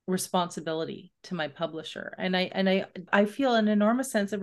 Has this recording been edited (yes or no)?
yes